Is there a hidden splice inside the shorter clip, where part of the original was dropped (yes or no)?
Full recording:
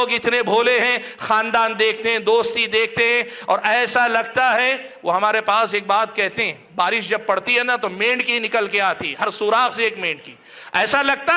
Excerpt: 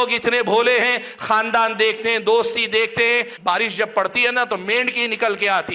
yes